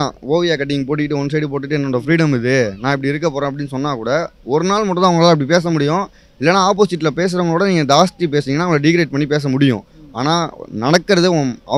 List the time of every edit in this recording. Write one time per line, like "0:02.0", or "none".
none